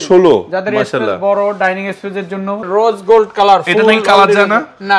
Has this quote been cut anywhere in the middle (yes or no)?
yes